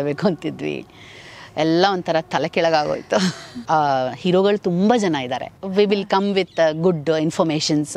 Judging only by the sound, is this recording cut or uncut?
cut